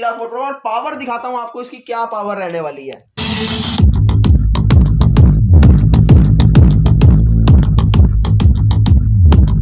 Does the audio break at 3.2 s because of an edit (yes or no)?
yes